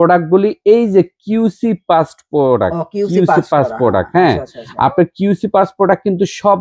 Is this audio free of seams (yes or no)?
yes